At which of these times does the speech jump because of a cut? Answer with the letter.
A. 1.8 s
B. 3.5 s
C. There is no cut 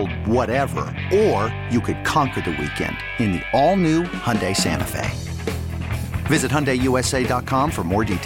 C